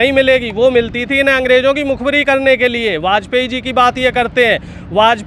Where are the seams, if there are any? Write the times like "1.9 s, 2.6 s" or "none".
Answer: none